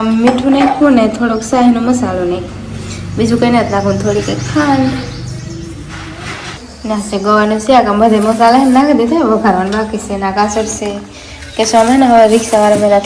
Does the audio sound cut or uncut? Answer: uncut